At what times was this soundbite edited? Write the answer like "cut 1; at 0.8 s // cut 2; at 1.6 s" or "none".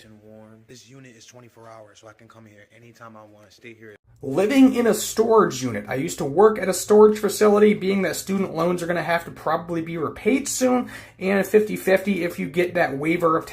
cut 1; at 4.1 s